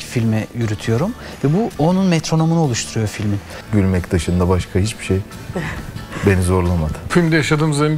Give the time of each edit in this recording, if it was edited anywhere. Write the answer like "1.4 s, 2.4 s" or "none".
3.5 s, 7.0 s